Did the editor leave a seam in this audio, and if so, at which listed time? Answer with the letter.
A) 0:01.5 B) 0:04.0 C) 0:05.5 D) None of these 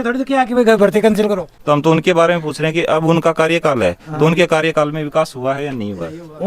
A